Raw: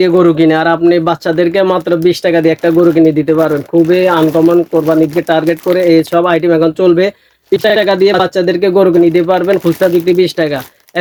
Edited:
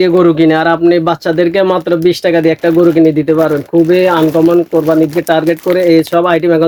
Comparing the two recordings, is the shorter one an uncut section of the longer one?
yes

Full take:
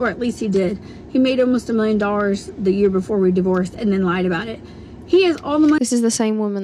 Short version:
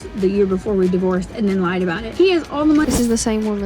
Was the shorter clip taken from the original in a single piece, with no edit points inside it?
no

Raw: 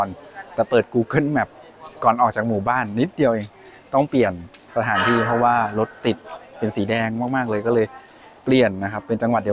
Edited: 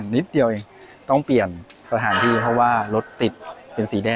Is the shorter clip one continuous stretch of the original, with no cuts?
yes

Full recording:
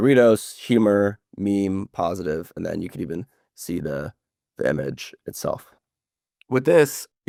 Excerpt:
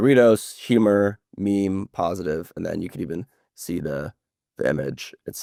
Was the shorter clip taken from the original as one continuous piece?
yes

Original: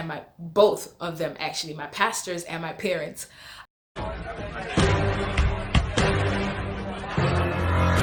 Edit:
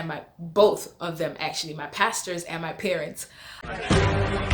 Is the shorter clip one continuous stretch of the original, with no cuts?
no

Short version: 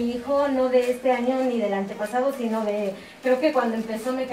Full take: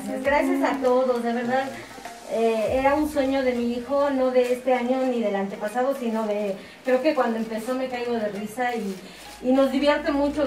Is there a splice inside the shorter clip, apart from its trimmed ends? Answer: no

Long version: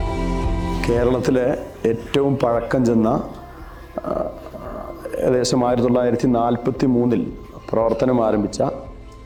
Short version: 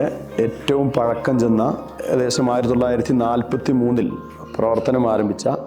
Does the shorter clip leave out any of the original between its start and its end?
yes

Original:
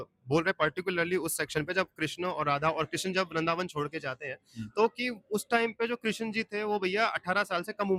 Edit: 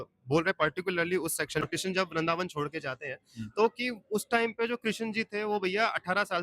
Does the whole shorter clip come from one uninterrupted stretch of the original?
no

